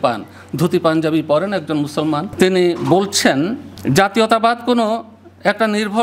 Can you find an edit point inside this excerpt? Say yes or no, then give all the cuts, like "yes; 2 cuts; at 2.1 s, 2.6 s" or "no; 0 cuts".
yes; 2 cuts; at 2.3 s, 3.7 s